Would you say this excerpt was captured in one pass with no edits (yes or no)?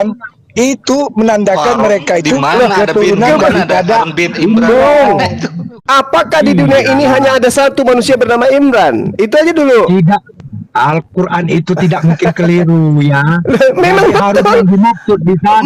no